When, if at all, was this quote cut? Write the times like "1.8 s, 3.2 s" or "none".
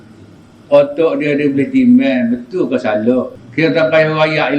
3.4 s